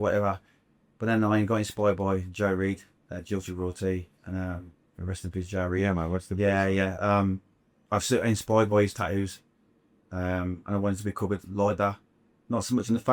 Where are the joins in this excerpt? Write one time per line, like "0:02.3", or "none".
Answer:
none